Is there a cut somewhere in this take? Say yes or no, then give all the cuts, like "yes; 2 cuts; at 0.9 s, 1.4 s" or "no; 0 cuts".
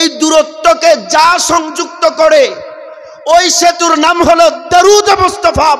no; 0 cuts